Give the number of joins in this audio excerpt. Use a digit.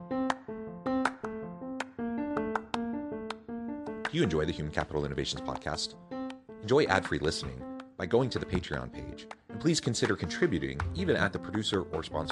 0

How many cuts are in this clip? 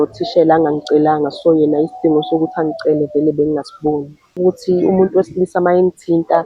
1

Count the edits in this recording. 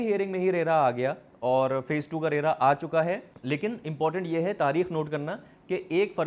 1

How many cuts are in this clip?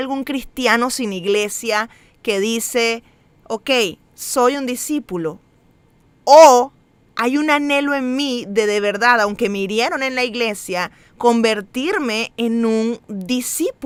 0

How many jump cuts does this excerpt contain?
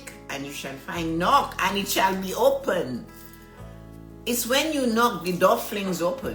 0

